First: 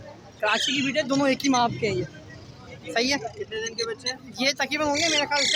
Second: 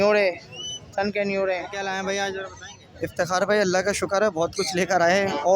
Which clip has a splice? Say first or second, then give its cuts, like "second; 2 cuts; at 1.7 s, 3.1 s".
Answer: second; 1 cut; at 1.7 s